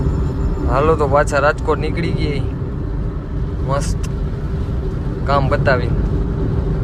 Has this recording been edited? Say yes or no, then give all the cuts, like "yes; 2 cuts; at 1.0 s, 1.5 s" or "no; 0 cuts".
no; 0 cuts